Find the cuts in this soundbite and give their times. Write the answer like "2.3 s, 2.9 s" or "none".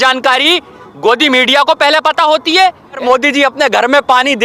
3.0 s